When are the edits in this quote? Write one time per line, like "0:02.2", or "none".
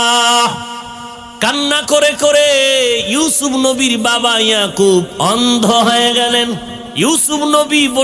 0:01.2
0:06.8